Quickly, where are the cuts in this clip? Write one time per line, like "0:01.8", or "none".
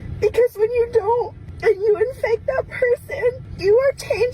0:01.4
0:03.5